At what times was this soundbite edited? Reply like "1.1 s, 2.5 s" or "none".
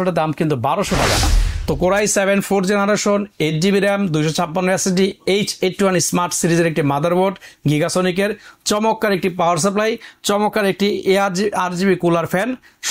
1.2 s

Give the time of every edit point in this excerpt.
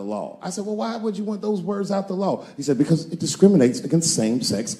none

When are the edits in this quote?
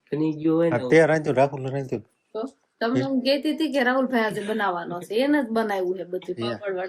none

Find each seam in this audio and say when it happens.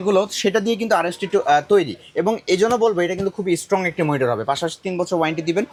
none

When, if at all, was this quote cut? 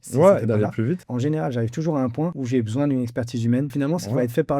1.1 s, 2.4 s, 3.7 s

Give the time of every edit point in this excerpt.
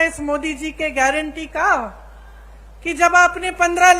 none

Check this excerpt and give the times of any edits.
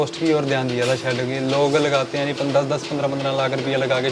none

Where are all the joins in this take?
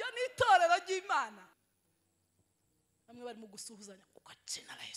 1.6 s

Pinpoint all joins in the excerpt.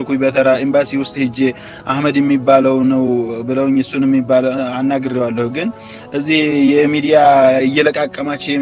none

